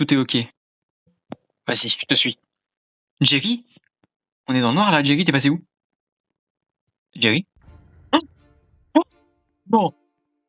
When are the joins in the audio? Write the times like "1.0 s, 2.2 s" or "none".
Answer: 1.1 s